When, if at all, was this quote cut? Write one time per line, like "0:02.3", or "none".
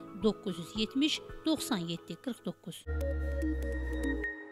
0:02.7